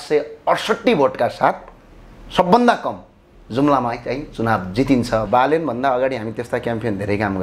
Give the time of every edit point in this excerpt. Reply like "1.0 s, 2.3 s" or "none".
5.3 s